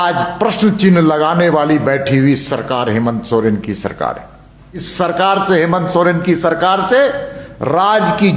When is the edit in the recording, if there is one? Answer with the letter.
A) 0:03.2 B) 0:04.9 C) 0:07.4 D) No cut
B